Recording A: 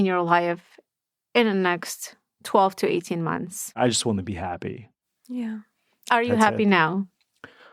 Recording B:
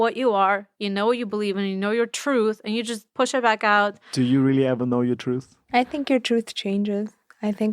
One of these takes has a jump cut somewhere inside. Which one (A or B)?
B